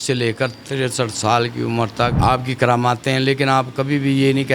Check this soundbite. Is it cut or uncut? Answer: cut